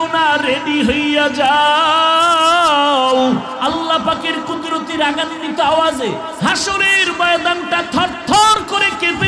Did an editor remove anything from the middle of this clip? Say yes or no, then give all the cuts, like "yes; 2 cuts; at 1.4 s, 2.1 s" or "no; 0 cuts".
yes; 1 cut; at 3.6 s